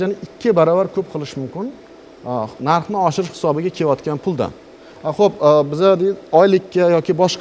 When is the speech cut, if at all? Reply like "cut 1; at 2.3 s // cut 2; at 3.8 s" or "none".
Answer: none